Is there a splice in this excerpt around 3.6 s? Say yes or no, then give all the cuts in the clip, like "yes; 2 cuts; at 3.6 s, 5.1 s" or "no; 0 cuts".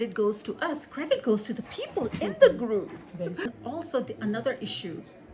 yes; 1 cut; at 3.6 s